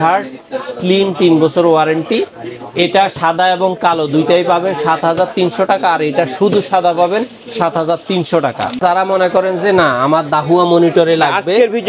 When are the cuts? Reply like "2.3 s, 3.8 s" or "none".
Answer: 8.8 s